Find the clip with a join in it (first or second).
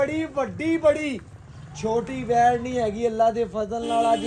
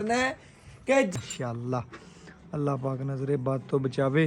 second